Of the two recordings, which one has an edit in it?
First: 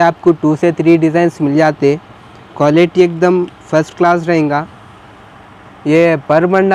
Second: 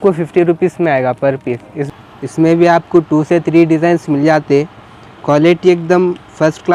second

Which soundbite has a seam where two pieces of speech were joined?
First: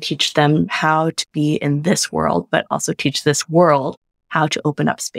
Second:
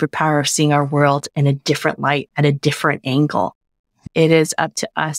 second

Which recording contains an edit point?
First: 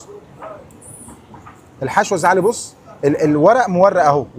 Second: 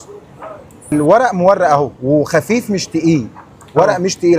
second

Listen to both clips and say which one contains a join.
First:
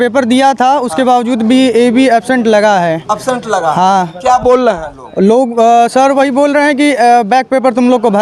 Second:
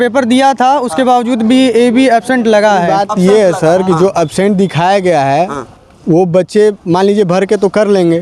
second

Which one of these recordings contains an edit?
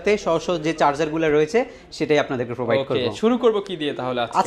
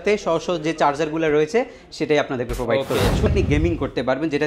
second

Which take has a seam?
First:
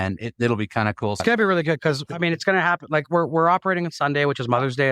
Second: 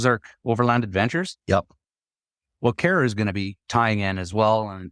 first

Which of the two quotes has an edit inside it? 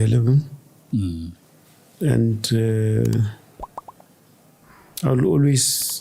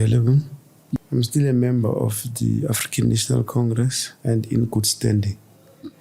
second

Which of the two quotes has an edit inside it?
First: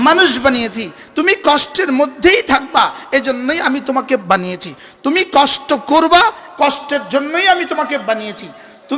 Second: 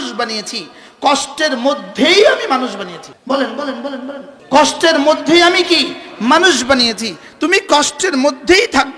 second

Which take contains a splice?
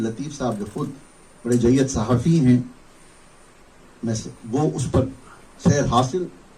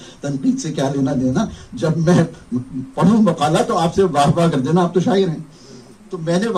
first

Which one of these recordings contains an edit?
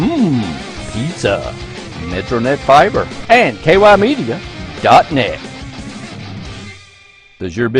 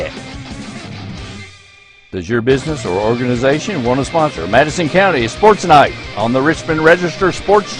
first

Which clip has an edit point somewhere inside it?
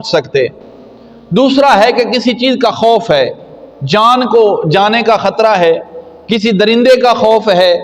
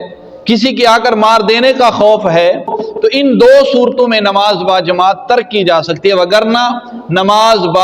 second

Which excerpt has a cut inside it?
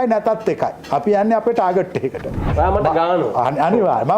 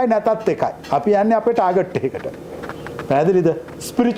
first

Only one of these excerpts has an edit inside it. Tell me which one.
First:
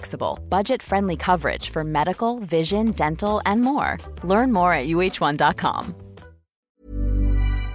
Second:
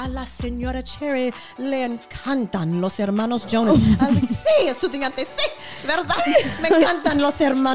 first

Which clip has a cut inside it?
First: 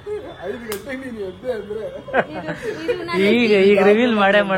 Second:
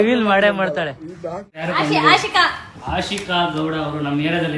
second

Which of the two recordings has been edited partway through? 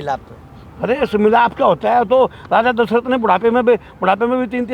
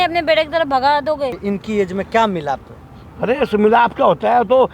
second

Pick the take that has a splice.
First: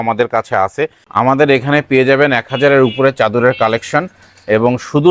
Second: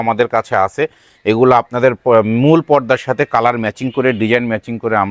first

